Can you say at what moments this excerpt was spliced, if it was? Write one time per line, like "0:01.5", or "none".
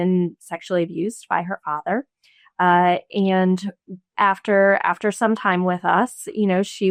none